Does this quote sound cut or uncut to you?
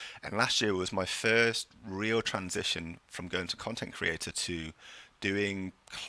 uncut